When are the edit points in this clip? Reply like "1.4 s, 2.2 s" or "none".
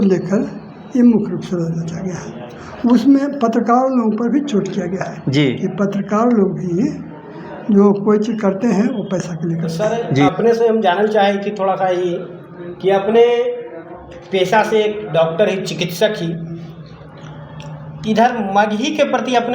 10.3 s